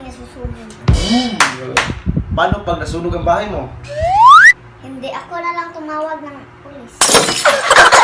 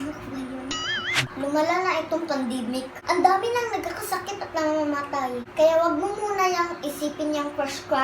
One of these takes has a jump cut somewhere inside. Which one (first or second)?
second